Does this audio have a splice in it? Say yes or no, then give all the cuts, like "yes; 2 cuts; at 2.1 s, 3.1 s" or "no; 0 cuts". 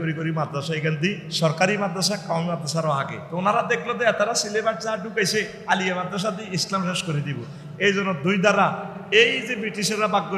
yes; 3 cuts; at 1.3 s, 3.2 s, 5.6 s